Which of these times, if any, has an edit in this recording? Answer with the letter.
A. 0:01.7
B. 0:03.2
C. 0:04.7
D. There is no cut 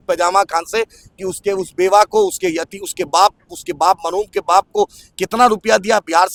D